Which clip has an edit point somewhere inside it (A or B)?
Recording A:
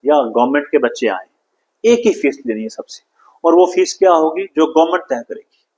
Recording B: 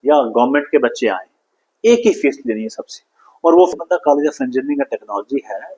B